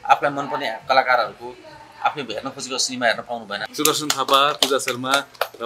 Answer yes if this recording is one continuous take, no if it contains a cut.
no